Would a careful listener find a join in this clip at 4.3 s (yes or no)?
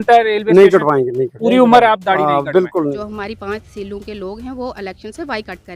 no